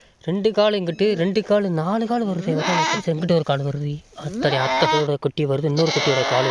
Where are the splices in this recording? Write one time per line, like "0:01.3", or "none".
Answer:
0:03.0
0:05.0

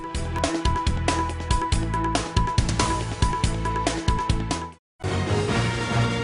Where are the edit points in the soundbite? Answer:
0:05.1

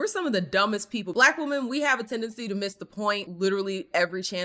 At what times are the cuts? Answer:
0:01.1

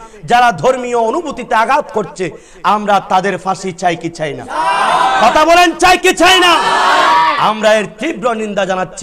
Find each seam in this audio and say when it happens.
none

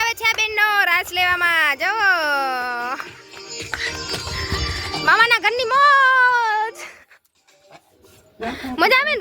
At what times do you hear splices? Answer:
none

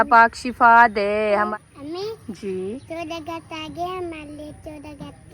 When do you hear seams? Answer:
0:01.5

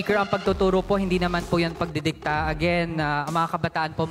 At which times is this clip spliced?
none

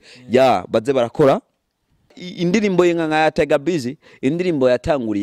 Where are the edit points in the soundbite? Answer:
0:02.2

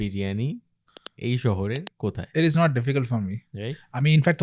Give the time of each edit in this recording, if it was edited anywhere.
none

